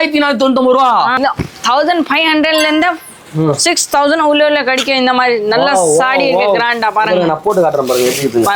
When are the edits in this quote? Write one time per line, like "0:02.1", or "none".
0:01.2